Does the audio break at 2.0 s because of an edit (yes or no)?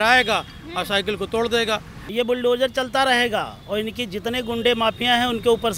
yes